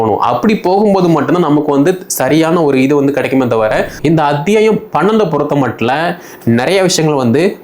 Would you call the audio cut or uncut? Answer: cut